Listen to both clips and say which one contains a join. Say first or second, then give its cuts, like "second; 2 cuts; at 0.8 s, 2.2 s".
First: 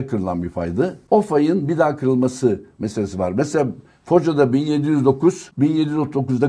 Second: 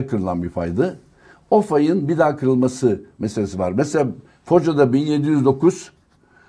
first; 2 cuts; at 1.0 s, 5.5 s